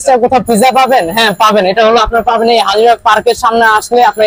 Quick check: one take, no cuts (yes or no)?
yes